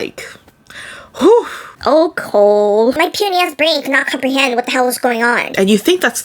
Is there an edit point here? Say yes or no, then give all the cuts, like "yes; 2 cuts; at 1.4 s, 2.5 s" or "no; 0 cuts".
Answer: yes; 2 cuts; at 3.0 s, 5.4 s